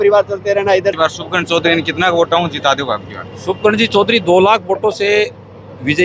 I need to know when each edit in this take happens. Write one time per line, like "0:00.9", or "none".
0:01.0